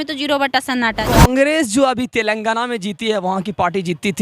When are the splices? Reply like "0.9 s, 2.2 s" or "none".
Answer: 1.1 s